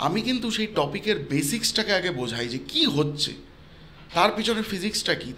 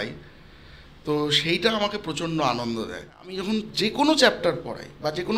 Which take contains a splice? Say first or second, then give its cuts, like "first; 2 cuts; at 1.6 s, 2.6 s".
second; 1 cut; at 3.3 s